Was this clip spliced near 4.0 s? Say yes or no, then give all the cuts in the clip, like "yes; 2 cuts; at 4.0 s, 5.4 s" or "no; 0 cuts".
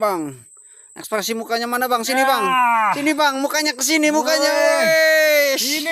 no; 0 cuts